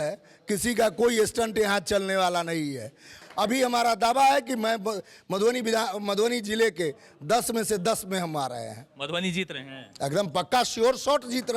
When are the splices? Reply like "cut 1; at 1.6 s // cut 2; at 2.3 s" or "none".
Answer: cut 1; at 3.2 s

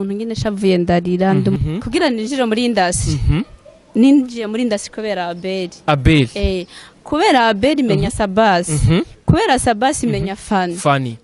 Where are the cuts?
cut 1; at 1.6 s

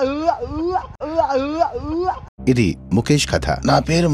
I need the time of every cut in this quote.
none

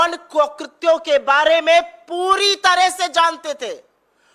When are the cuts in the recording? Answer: none

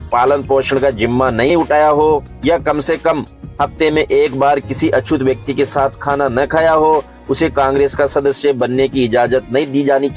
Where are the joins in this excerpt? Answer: cut 1; at 1.5 s

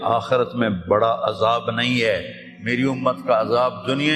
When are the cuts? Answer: none

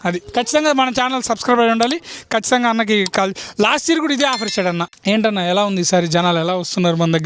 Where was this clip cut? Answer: cut 1; at 4.9 s

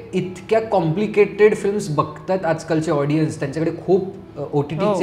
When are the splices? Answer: none

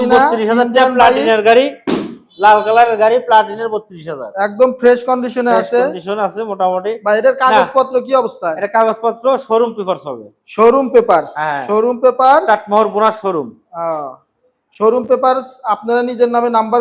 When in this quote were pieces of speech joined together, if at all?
none

